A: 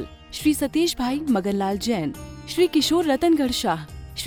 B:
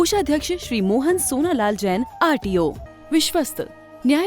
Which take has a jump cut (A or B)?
B